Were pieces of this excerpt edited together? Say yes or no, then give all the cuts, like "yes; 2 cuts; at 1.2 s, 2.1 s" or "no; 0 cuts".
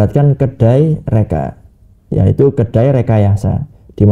no; 0 cuts